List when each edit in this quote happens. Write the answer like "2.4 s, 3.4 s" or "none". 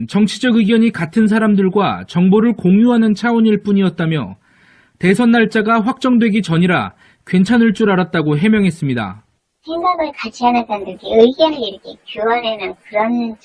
8.3 s

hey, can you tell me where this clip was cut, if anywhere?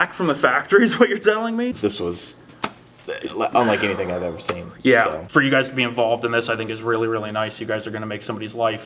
1.7 s, 5.2 s

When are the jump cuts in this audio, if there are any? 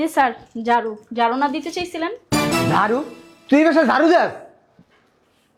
none

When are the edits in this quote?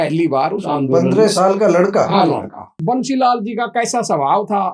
2.8 s

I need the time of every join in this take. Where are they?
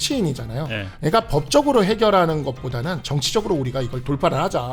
none

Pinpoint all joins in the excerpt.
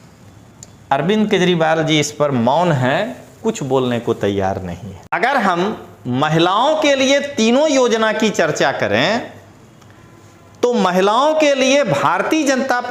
5.1 s

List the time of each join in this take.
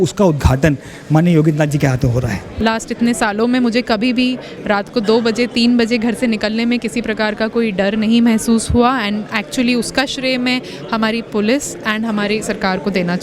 2.4 s

